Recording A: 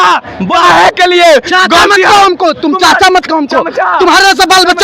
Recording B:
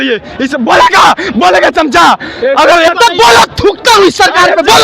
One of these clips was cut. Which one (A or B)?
B